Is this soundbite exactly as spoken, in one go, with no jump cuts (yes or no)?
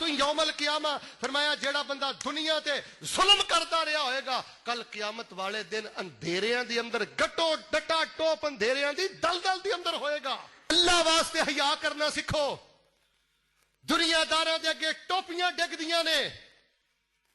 no